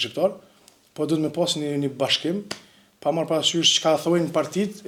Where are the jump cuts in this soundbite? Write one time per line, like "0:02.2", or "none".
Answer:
none

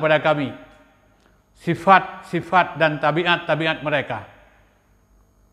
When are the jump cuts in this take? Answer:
none

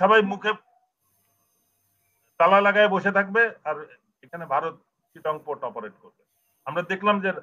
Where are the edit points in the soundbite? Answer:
none

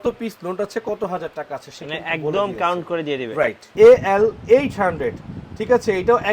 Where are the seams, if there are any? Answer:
0:03.6

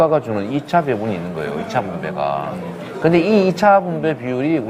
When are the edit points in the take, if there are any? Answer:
none

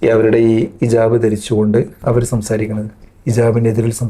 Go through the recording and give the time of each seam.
0:01.9

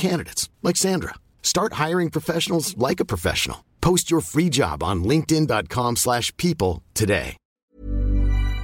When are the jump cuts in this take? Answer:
0:07.7

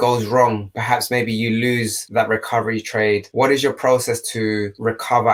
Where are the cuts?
none

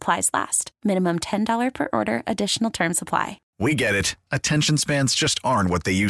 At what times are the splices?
0:03.4

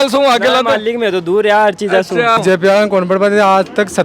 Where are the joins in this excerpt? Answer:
0:02.4

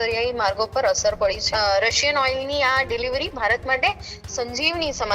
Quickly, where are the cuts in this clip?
0:01.5

